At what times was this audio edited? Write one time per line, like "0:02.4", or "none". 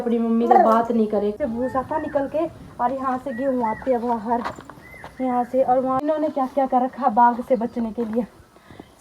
0:01.4
0:06.0

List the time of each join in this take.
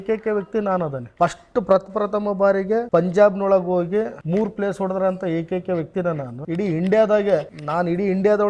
0:01.0
0:02.9
0:04.2
0:06.3
0:07.6

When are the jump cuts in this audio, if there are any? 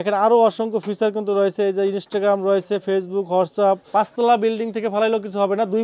0:03.9

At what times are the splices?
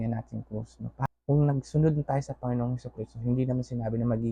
0:01.0

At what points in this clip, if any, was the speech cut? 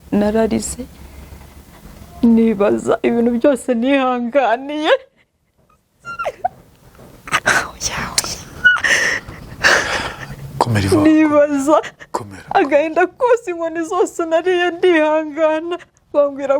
none

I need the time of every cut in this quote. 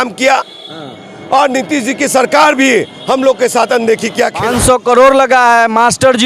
0:04.4

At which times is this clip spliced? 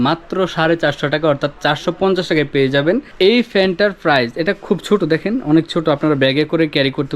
0:03.1

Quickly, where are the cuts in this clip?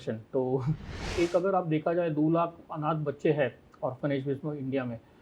0:01.0

